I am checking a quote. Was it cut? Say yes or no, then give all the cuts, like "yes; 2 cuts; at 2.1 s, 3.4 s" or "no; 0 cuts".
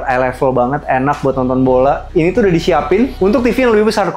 yes; 2 cuts; at 2.0 s, 3.1 s